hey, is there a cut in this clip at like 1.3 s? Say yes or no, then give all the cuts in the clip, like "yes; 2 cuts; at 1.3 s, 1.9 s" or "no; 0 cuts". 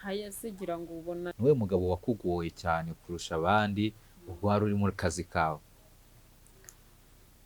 yes; 1 cut; at 1.3 s